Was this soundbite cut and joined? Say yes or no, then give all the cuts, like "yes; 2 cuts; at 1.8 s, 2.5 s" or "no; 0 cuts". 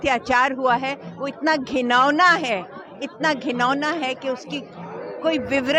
no; 0 cuts